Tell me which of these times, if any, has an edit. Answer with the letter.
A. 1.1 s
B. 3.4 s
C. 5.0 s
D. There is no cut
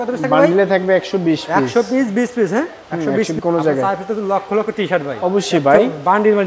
B